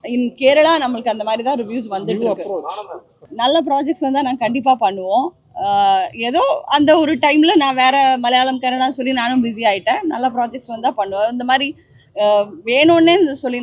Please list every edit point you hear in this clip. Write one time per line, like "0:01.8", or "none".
0:03.2